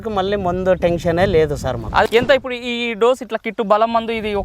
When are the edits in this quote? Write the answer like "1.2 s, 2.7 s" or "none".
2.1 s